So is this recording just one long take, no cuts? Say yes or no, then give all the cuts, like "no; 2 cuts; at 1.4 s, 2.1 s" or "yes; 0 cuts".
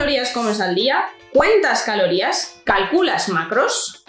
yes; 0 cuts